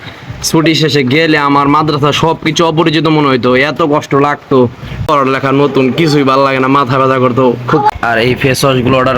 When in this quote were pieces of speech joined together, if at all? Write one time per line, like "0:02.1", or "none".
0:05.1
0:07.9